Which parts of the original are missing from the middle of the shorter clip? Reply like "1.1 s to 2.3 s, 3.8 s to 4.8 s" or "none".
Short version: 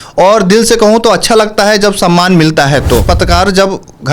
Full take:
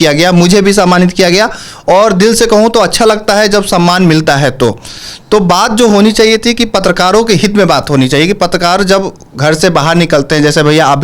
4.8 s to 8.4 s